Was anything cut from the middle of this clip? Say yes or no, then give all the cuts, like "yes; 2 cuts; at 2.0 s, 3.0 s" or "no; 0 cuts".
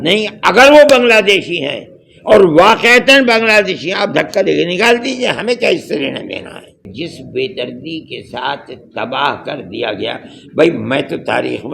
yes; 1 cut; at 6.9 s